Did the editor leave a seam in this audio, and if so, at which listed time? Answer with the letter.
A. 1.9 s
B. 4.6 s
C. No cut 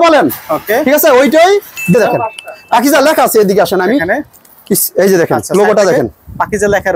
A